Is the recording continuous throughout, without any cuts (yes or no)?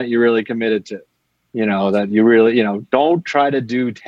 yes